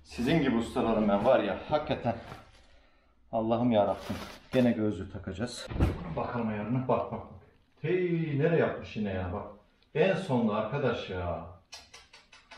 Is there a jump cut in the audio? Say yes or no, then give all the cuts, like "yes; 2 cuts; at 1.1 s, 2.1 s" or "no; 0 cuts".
yes; 1 cut; at 5.6 s